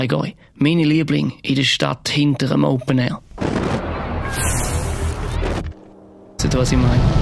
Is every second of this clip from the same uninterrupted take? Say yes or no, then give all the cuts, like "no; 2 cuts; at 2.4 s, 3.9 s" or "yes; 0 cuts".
yes; 0 cuts